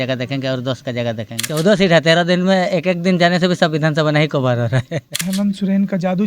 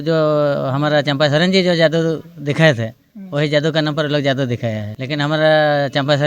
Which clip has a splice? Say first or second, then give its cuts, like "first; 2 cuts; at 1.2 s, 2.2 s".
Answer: first; 2 cuts; at 1.4 s, 5.2 s